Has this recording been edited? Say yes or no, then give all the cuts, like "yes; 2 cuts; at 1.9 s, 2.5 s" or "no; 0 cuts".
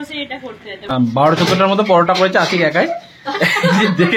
yes; 1 cut; at 0.9 s